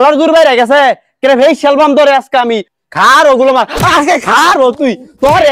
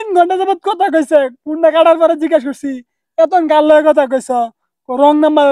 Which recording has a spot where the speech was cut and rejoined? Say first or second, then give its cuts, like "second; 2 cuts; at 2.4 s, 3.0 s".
first; 1 cut; at 2.7 s